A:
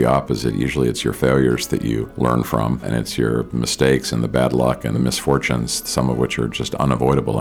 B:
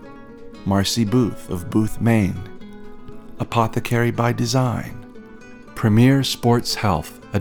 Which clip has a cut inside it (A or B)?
A